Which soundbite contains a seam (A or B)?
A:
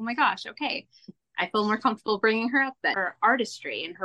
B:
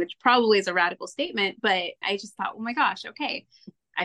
A